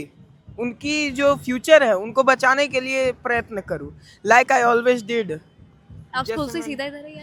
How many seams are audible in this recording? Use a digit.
0